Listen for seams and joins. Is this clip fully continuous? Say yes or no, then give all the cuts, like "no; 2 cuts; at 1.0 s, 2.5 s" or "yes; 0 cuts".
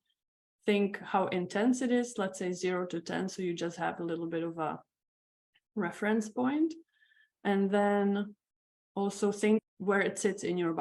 no; 1 cut; at 9.6 s